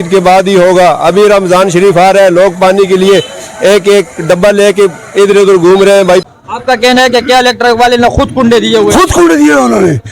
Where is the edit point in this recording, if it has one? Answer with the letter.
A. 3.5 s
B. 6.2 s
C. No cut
B